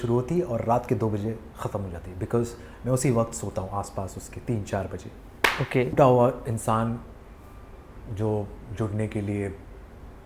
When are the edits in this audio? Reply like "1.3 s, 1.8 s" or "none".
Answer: 5.9 s